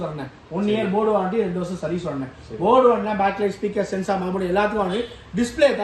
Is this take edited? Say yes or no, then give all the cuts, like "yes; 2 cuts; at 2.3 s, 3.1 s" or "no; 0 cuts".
no; 0 cuts